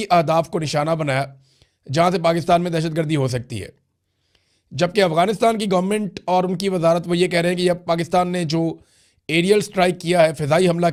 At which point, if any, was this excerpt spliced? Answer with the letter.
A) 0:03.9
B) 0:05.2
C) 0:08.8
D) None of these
D